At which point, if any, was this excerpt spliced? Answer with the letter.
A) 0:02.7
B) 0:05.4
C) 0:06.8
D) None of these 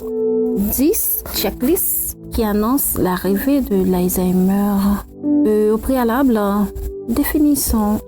B